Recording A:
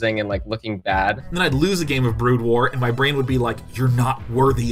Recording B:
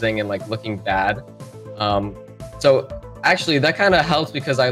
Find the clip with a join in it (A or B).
A